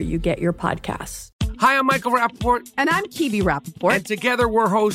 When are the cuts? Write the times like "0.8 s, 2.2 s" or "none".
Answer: 1.2 s